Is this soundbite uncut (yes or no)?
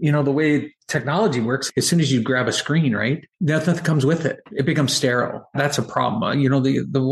no